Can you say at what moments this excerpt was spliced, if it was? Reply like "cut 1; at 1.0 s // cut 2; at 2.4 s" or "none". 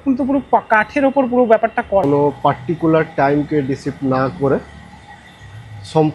cut 1; at 2.0 s